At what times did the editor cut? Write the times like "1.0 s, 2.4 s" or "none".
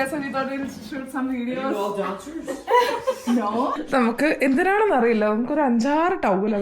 3.8 s